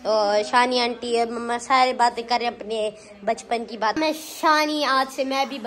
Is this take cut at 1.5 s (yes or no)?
no